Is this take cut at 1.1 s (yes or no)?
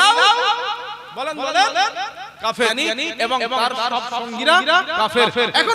no